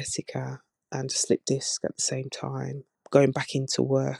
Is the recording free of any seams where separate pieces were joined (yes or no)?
yes